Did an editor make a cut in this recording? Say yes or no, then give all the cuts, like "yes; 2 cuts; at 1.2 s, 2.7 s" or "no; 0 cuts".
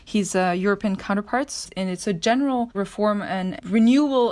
yes; 2 cuts; at 1.6 s, 3.3 s